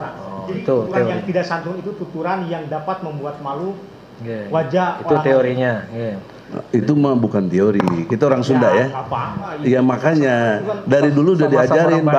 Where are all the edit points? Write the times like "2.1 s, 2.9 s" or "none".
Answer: none